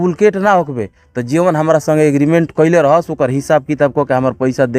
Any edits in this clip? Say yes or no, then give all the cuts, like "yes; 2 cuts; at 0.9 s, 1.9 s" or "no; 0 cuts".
no; 0 cuts